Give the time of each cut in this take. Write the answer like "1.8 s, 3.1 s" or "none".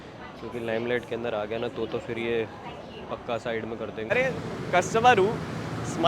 4.1 s